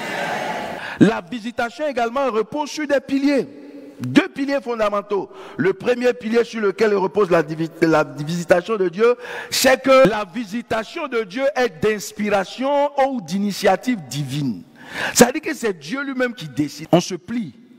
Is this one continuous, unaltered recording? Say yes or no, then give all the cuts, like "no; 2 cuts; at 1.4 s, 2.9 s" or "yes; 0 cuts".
no; 3 cuts; at 0.8 s, 10.1 s, 16.8 s